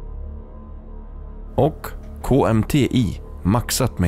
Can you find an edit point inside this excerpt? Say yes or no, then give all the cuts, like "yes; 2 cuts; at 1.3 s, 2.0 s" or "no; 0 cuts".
yes; 1 cut; at 1.5 s